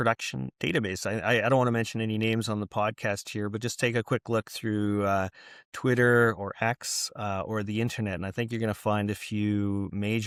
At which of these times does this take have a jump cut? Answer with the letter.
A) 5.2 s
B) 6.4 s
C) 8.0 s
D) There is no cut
D